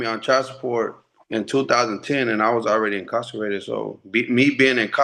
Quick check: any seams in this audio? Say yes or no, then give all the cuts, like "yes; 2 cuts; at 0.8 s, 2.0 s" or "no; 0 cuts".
no; 0 cuts